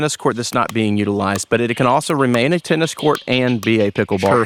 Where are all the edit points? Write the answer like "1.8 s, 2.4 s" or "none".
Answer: none